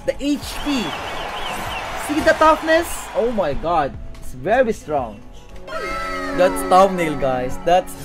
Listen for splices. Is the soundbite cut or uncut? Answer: cut